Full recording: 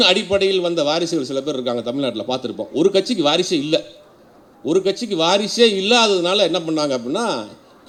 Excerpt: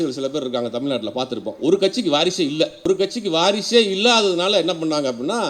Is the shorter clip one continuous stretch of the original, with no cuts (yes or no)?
no